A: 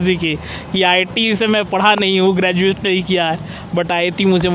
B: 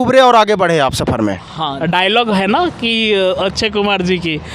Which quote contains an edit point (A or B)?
B